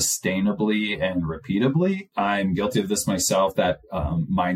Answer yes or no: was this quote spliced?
yes